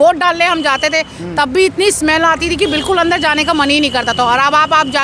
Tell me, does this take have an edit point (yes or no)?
no